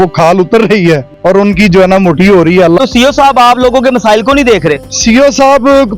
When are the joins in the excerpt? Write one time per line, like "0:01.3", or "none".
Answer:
0:01.1
0:02.8
0:04.9